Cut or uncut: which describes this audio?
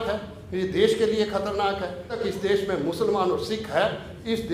cut